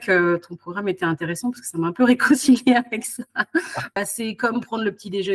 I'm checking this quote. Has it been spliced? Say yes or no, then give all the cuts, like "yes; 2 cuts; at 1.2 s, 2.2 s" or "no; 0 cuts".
yes; 1 cut; at 3.9 s